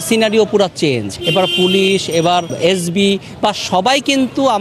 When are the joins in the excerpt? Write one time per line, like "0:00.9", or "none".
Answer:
0:01.1
0:02.5